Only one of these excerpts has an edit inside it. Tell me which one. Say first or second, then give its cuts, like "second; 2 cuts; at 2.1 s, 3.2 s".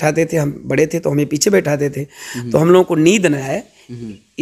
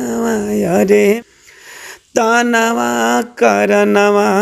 second; 1 cut; at 1.2 s